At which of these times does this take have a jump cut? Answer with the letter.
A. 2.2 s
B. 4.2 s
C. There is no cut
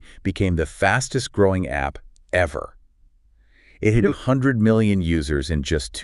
C